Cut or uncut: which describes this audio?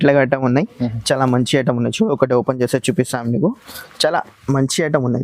uncut